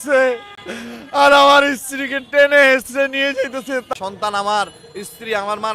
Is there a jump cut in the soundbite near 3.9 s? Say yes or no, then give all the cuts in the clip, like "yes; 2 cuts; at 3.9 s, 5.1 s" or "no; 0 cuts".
yes; 1 cut; at 3.9 s